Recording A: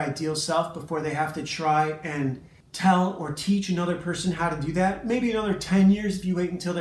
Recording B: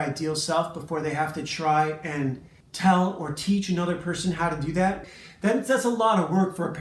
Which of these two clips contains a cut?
B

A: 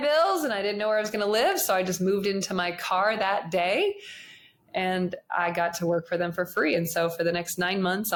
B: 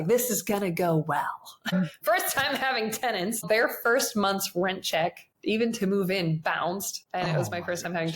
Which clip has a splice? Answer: B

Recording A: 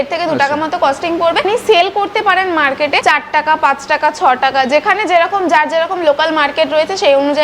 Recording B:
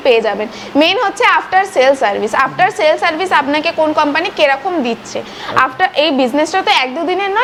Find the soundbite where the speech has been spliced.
A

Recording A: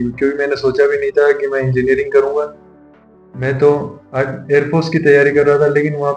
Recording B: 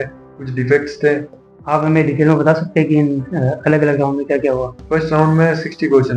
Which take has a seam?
B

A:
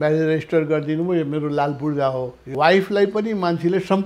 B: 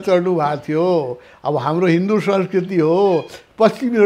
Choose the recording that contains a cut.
A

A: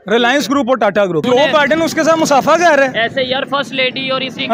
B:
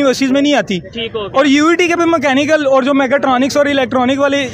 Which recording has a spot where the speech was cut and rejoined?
A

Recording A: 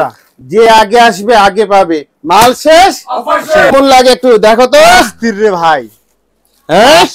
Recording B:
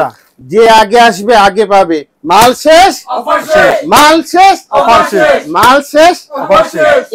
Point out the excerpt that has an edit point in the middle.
A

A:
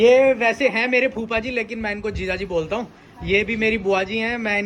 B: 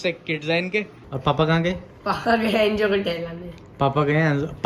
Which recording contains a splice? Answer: B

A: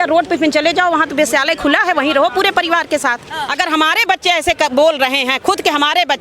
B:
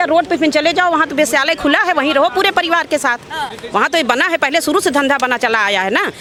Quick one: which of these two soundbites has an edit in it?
A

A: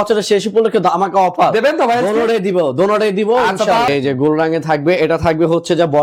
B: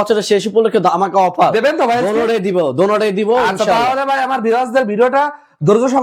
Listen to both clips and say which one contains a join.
A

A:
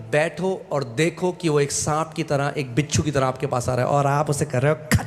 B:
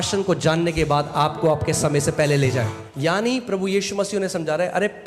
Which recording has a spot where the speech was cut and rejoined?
B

